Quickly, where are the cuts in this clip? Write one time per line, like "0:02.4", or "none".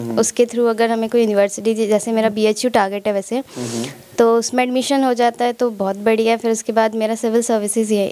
none